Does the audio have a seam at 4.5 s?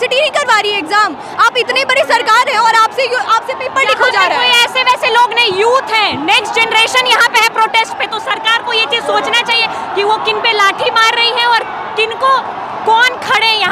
no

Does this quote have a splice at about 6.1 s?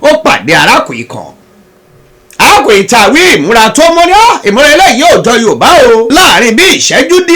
yes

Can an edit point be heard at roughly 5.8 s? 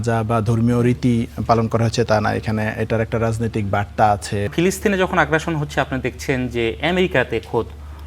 no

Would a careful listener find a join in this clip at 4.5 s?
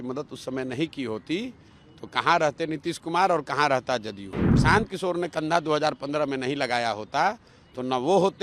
yes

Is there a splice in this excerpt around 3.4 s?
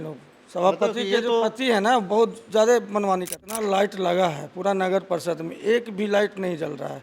yes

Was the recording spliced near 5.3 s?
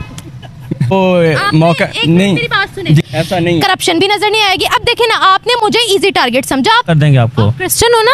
no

